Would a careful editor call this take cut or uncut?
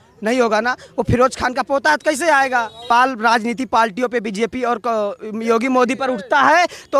cut